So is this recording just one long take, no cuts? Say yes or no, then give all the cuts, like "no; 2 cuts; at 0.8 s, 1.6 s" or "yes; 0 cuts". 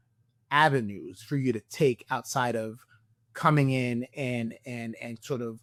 yes; 0 cuts